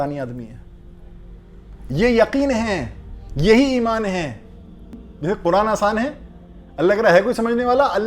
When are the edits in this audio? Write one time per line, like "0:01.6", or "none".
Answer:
0:05.0